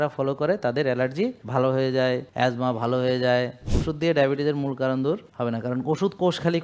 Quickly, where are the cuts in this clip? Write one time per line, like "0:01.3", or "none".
0:01.4
0:02.3
0:03.7
0:05.3